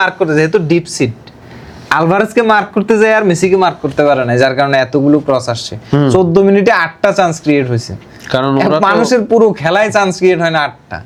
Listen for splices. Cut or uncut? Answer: uncut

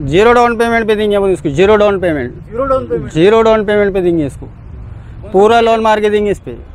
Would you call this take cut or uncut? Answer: uncut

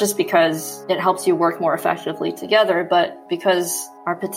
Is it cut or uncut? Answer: cut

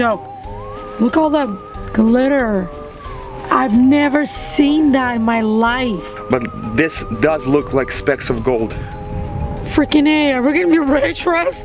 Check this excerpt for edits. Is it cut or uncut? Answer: cut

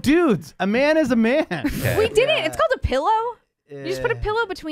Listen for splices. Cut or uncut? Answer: cut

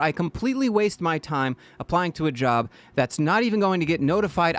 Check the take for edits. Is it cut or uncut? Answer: uncut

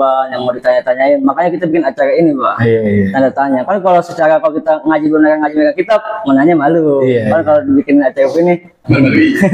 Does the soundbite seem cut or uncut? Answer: uncut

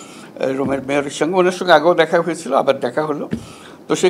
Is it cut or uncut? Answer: uncut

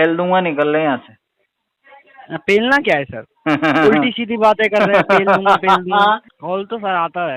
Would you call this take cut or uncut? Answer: cut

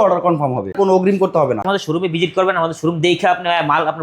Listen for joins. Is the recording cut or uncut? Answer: cut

